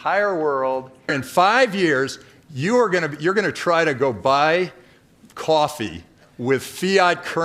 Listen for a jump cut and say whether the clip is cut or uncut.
cut